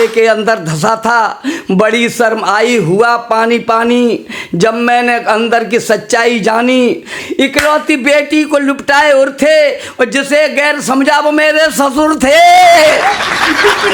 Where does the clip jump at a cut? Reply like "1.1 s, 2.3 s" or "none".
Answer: none